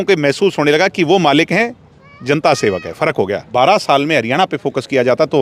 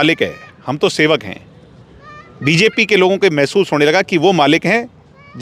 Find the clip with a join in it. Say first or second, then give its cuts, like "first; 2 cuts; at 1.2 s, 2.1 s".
first; 1 cut; at 3.5 s